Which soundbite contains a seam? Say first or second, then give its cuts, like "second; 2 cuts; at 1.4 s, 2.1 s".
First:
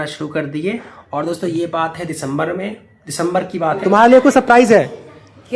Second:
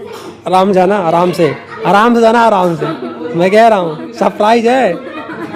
first; 1 cut; at 3.8 s